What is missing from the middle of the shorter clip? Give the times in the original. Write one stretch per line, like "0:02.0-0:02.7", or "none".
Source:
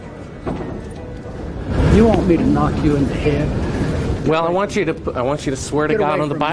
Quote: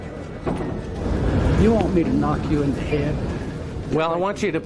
0:01.0-0:01.3